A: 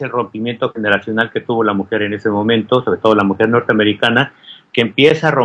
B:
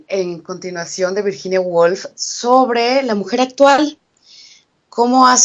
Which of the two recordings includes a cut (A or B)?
A